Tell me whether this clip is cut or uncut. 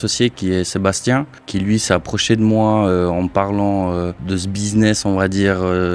cut